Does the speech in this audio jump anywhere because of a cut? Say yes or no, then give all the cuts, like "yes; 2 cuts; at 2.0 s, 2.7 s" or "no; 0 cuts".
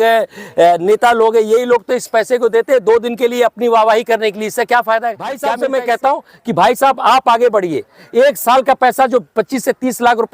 yes; 1 cut; at 5.4 s